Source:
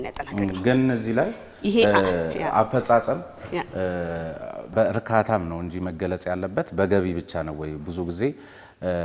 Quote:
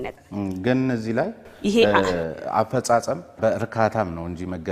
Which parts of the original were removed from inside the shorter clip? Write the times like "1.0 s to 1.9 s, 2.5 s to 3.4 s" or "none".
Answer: 3.3 s to 4.6 s